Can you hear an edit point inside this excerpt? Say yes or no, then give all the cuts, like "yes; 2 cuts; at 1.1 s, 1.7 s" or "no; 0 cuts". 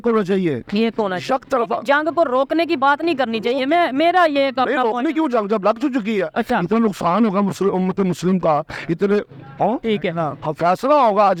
no; 0 cuts